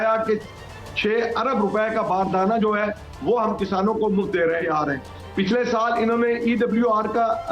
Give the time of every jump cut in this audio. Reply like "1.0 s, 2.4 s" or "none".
4.6 s